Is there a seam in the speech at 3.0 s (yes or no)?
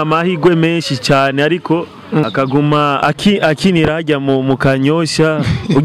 yes